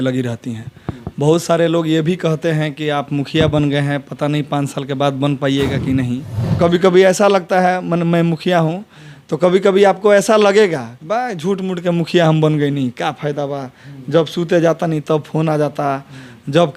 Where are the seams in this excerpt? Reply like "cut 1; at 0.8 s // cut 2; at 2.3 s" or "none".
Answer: cut 1; at 6.0 s